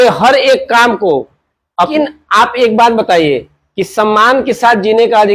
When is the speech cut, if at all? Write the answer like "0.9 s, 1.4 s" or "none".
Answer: 1.9 s